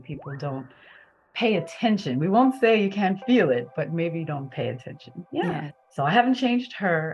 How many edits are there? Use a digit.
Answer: 1